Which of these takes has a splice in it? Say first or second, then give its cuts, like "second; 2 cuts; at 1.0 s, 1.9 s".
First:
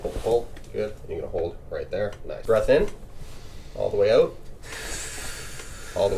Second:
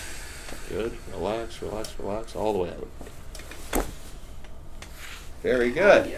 first; 1 cut; at 2.3 s